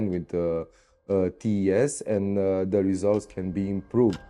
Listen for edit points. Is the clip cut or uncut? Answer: uncut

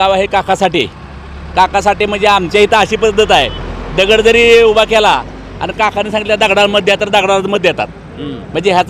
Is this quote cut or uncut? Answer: uncut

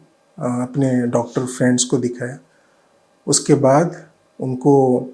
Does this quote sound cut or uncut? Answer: uncut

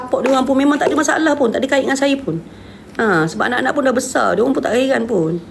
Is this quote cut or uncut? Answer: uncut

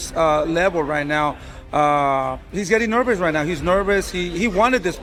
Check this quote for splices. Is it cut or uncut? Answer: uncut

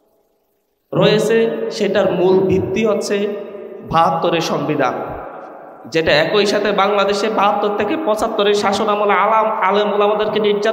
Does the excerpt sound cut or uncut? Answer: uncut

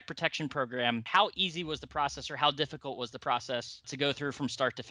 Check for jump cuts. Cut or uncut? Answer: cut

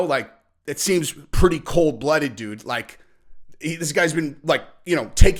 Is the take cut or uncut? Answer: uncut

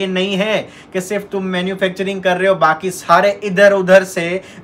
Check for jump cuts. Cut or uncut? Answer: uncut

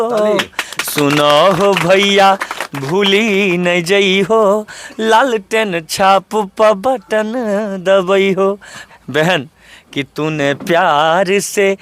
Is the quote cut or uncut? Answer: cut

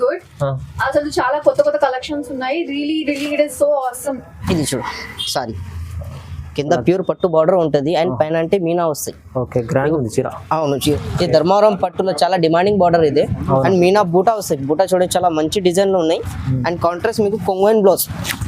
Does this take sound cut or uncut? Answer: cut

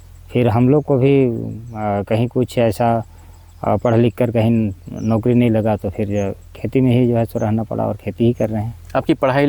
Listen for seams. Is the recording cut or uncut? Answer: uncut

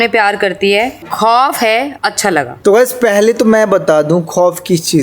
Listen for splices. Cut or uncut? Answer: uncut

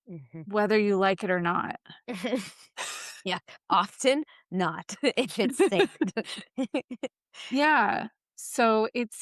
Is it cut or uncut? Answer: cut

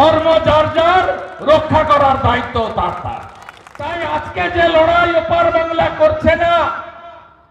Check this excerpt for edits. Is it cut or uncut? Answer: cut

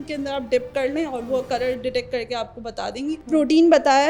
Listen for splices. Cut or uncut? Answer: cut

